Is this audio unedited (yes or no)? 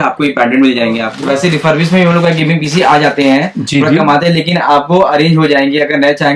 no